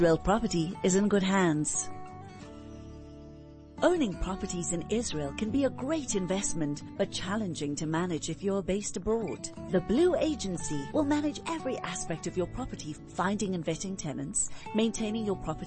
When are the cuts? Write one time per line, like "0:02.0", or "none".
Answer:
0:01.7
0:03.7

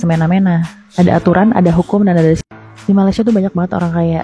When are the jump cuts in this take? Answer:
0:02.5

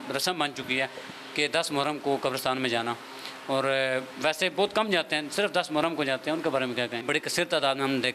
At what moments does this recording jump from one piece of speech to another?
0:07.0

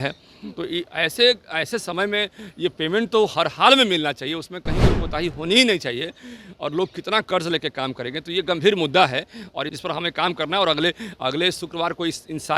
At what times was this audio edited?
0:09.7

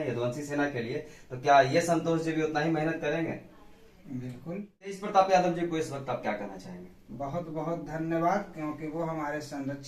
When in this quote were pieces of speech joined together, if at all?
0:05.0

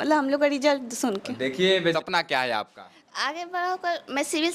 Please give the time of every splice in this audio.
0:01.9

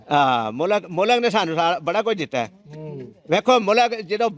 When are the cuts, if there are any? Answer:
none

